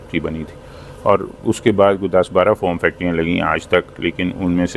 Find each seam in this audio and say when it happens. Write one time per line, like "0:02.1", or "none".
none